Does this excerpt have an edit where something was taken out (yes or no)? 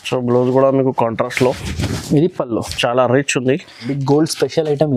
yes